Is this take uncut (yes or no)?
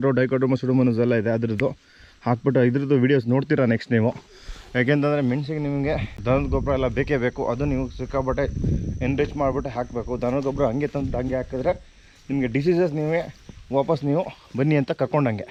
yes